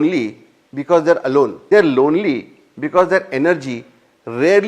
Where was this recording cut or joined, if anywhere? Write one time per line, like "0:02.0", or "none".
0:01.6